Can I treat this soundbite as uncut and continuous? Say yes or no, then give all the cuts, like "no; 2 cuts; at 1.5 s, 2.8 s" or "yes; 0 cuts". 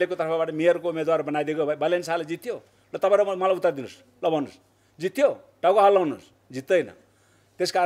yes; 0 cuts